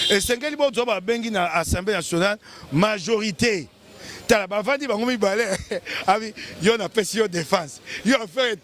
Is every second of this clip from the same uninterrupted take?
yes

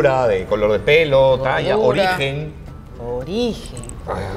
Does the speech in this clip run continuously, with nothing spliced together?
yes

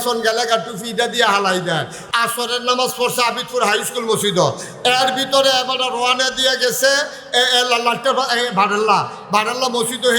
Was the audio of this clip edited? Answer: yes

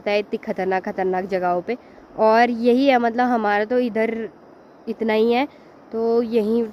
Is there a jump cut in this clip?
no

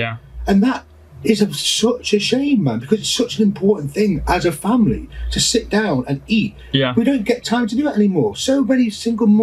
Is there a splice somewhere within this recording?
no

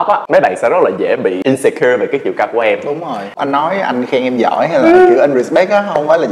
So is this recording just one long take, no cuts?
no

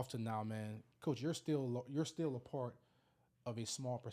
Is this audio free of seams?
yes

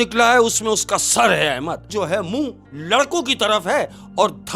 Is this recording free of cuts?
no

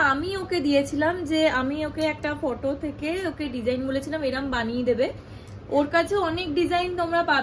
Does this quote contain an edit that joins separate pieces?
no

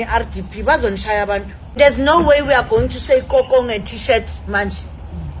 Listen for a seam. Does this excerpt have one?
yes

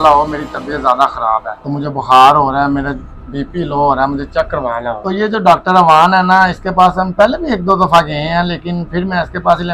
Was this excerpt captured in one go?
no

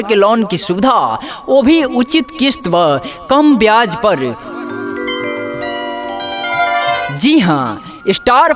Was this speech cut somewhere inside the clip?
yes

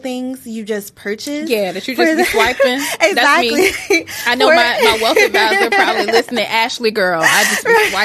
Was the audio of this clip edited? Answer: no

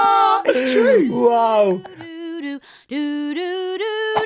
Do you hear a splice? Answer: yes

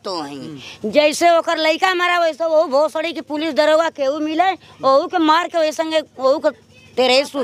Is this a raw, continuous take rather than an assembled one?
yes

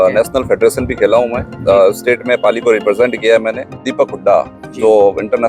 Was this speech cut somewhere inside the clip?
yes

